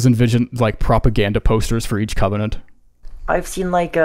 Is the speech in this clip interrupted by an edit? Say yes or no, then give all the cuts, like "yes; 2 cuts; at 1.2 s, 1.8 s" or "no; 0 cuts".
yes; 1 cut; at 2.9 s